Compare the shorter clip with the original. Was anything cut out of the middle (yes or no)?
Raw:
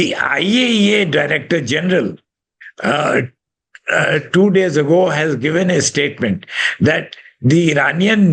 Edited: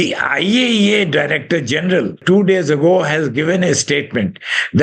yes